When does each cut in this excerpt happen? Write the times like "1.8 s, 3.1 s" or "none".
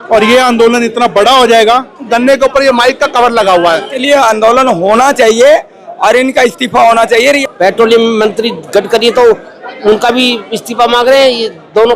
2.1 s, 3.9 s, 7.4 s